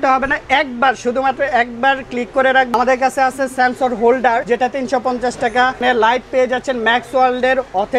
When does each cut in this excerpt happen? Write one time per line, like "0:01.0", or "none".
0:02.7
0:04.4
0:05.8